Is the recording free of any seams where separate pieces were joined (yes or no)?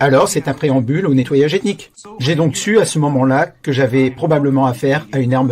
no